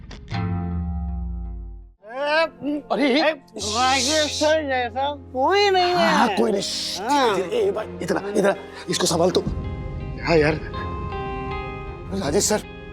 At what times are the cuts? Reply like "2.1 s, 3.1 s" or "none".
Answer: 1.9 s